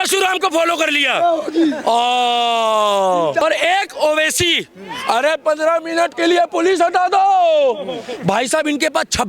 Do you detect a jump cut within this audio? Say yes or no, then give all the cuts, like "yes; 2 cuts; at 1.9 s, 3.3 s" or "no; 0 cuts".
yes; 1 cut; at 3.4 s